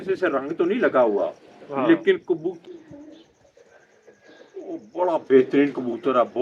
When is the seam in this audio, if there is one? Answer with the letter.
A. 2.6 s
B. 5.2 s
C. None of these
A